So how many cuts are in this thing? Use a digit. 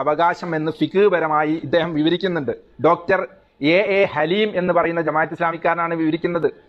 0